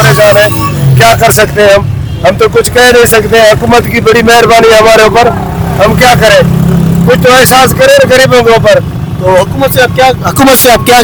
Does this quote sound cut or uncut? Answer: uncut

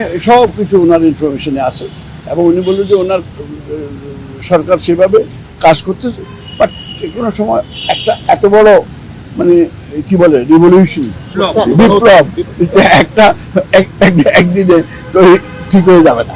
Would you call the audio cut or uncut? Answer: uncut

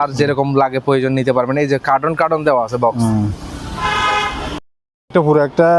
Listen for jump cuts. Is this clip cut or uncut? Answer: uncut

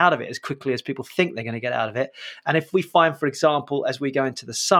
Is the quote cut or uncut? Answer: uncut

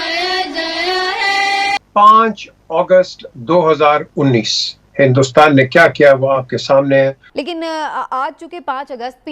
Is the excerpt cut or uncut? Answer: cut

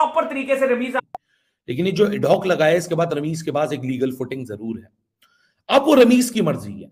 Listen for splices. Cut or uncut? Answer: cut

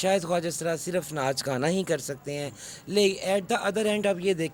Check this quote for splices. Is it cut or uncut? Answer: uncut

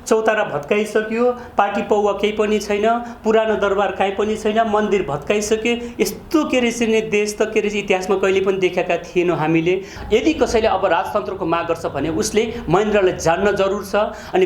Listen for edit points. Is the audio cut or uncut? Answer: cut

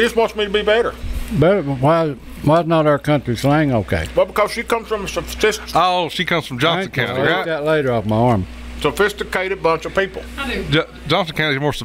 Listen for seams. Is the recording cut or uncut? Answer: uncut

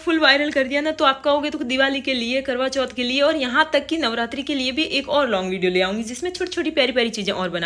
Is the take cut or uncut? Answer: uncut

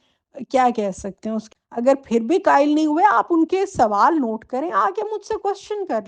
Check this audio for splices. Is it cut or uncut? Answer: cut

